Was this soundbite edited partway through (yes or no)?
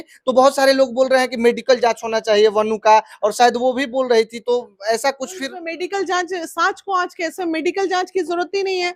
no